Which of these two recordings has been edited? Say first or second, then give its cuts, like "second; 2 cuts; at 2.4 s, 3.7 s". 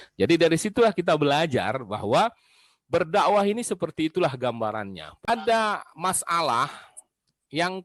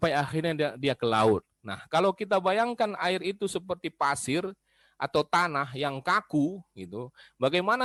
first; 1 cut; at 5.3 s